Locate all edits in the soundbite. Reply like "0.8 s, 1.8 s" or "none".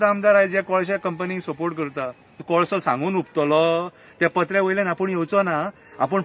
2.4 s